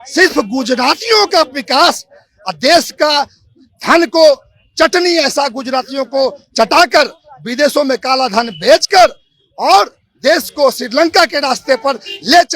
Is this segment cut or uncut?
uncut